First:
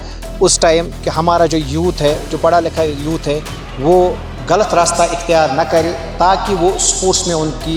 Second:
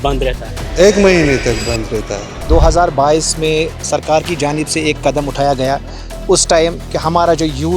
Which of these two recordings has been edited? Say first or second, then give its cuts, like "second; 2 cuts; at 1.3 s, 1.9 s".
second; 1 cut; at 2.4 s